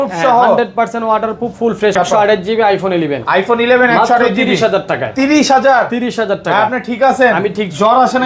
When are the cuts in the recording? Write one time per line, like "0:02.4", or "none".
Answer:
0:01.9